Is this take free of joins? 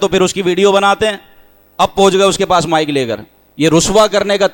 yes; 0 cuts

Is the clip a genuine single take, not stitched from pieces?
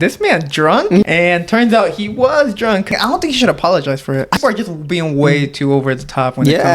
no; 3 cuts; at 1.0 s, 2.9 s, 4.4 s

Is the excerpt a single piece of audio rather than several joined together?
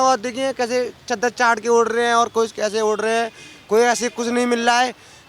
yes; 0 cuts

